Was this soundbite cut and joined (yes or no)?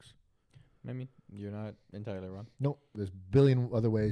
yes